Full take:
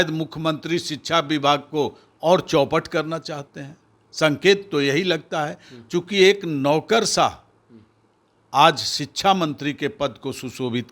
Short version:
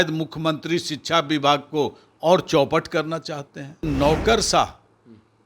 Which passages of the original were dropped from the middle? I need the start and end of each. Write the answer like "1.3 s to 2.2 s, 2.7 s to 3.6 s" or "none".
3.8 s to 6.5 s

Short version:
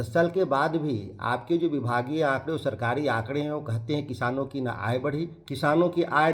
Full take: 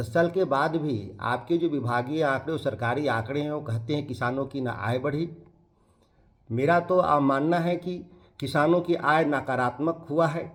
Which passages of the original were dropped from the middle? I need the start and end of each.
5.4 s to 8.3 s

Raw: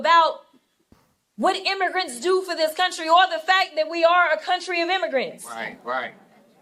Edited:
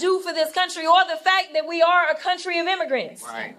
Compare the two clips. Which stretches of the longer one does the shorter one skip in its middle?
none

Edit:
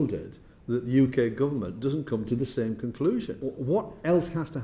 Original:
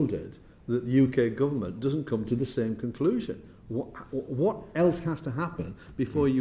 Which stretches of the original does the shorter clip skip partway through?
3.4 s to 4.1 s

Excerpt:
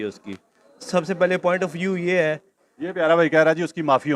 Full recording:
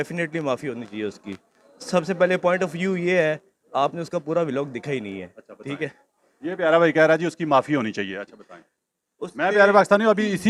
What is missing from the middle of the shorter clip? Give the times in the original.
3.5 s to 6.2 s

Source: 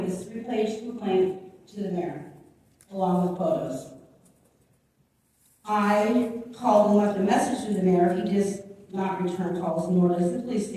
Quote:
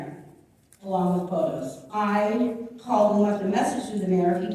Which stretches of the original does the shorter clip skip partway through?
3.9 s to 5.5 s

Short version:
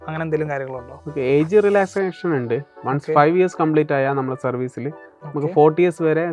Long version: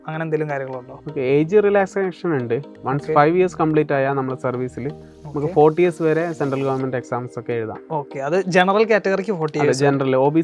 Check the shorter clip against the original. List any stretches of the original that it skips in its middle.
none

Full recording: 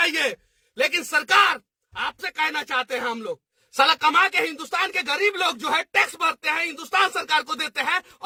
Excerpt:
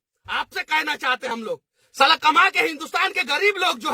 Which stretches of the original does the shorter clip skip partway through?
2.9 s to 3.1 s

